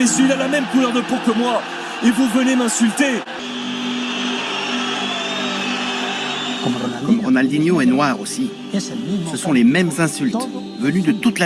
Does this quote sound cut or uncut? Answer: cut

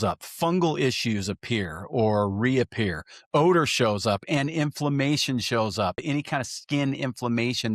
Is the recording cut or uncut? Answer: cut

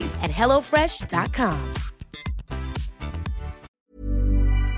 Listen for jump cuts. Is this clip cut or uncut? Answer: cut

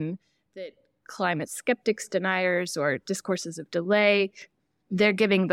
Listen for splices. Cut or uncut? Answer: uncut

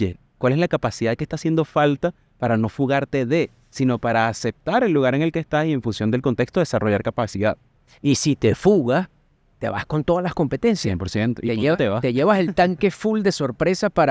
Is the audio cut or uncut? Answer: uncut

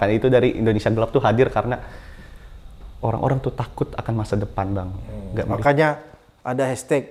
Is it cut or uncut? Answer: uncut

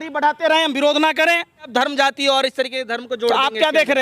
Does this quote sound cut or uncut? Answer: cut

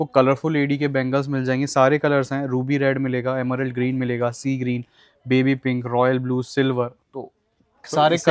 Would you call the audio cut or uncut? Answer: uncut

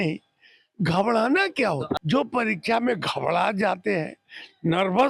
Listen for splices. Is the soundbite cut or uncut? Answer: cut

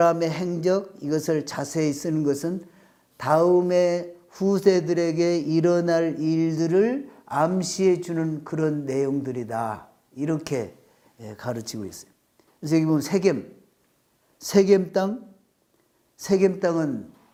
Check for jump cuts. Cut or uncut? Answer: uncut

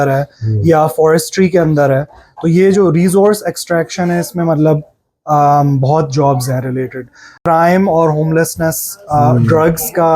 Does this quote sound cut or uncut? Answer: cut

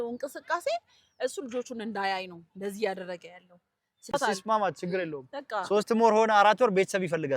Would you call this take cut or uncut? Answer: cut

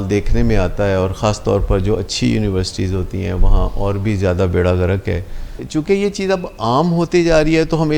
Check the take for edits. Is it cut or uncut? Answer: cut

